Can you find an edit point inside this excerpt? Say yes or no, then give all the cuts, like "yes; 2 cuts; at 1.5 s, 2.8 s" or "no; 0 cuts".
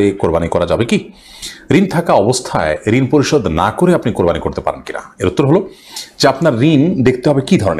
no; 0 cuts